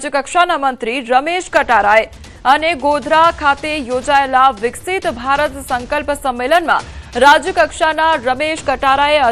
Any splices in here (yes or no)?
yes